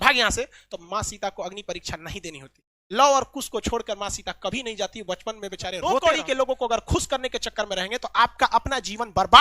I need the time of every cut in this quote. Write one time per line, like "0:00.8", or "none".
0:05.8